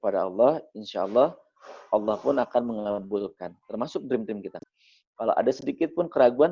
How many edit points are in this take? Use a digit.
1